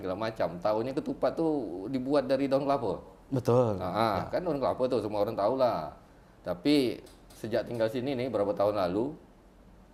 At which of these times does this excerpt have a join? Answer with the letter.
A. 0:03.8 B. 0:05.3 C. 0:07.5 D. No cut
D